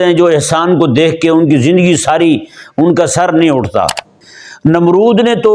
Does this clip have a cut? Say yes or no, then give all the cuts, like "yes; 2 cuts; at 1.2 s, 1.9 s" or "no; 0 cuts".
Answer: yes; 1 cut; at 4.2 s